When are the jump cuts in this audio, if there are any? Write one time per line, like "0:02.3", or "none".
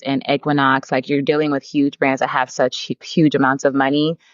0:02.9